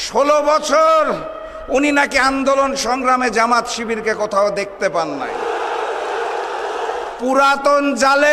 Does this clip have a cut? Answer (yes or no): yes